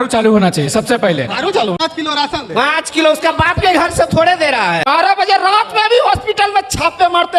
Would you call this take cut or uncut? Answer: cut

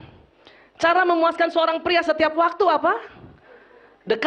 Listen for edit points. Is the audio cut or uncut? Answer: uncut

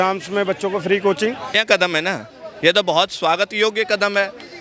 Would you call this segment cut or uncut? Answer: cut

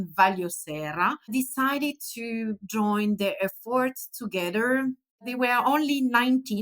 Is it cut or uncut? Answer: cut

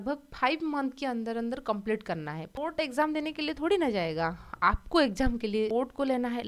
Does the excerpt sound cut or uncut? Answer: cut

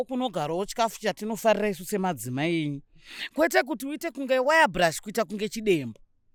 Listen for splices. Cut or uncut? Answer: uncut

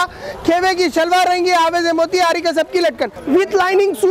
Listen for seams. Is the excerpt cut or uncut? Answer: cut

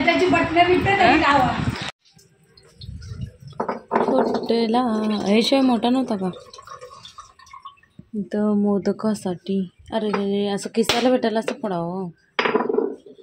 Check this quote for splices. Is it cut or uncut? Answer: cut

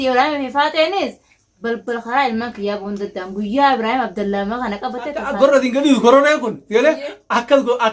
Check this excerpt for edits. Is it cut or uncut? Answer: cut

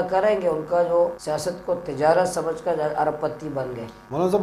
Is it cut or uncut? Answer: cut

